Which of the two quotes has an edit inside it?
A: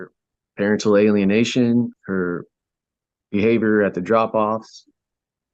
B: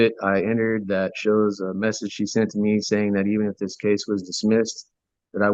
A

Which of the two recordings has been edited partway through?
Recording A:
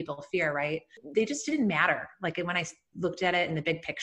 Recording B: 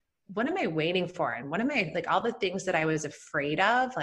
A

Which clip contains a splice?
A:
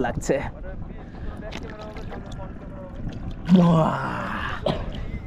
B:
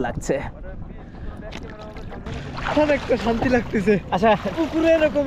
B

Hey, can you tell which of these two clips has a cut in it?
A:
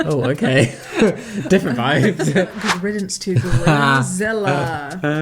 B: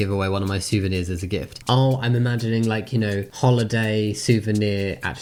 A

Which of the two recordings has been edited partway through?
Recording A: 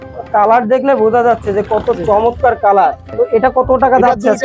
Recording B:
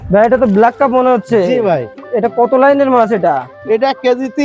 A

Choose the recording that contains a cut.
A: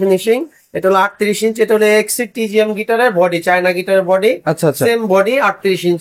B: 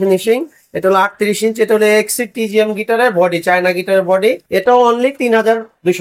B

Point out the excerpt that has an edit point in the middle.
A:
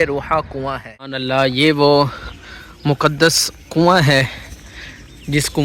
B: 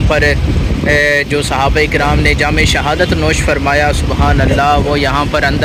A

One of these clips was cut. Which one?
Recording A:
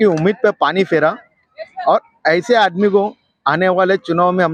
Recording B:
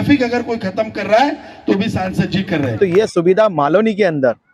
B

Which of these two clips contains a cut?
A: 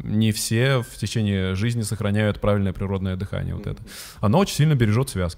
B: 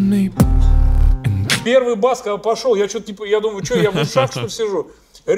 B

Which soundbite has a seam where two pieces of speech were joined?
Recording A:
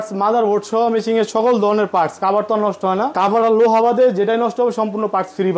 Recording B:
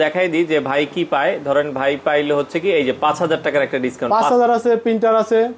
A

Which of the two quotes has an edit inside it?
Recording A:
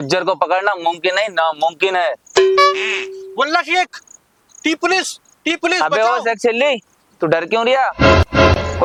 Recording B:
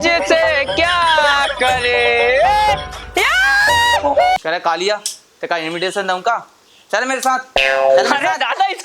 B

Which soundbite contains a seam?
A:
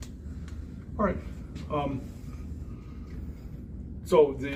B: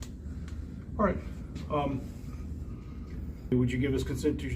B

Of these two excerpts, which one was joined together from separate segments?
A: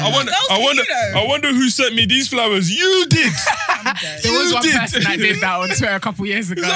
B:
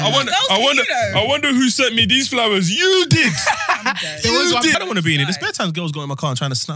B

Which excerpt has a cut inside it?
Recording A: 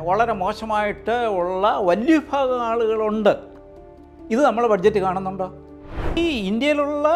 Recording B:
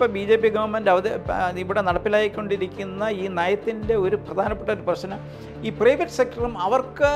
A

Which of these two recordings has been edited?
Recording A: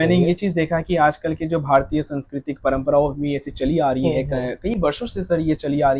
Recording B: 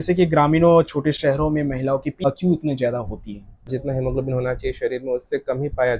B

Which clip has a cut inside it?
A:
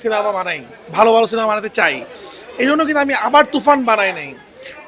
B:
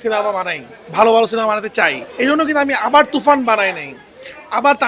B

